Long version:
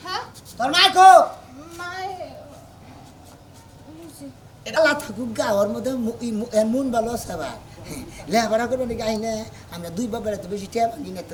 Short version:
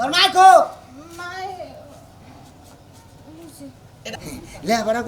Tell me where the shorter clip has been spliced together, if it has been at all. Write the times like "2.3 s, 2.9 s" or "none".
4.0 s

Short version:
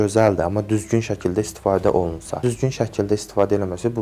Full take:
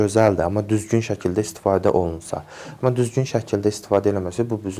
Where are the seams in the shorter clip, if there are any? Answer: 2.4 s

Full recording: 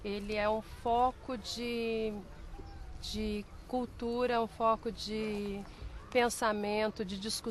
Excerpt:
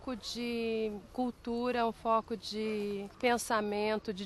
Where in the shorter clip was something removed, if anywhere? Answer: 1.0 s, 3.1 s

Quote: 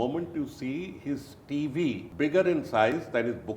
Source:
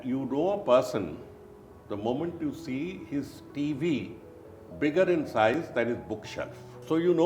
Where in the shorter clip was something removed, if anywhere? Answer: 2.1 s

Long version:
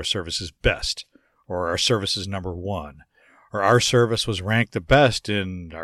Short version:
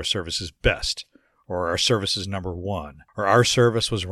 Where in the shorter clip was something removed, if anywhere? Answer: 3.0 s

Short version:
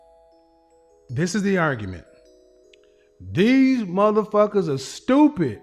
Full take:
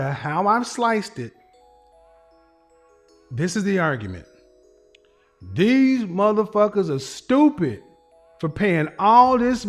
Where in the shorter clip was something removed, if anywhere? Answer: 1.0 s

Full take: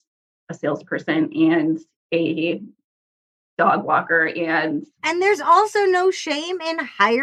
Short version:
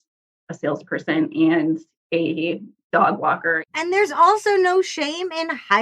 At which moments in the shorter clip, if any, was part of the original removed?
2.7 s, 3.6 s

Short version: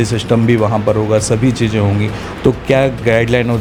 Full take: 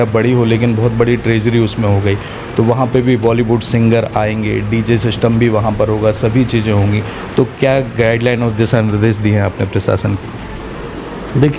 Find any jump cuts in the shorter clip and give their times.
none

